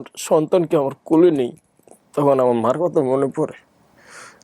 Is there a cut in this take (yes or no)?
no